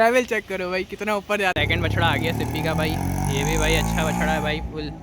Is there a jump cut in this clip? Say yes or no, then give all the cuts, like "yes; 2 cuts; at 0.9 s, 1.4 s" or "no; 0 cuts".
yes; 1 cut; at 1.5 s